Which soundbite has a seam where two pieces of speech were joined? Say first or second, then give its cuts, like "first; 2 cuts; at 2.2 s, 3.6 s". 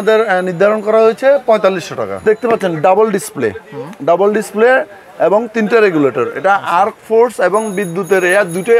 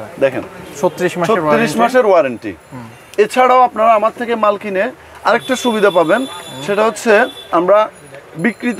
first; 1 cut; at 2.2 s